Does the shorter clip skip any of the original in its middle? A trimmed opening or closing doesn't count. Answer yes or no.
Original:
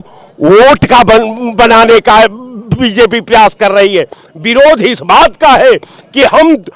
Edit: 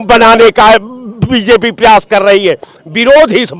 no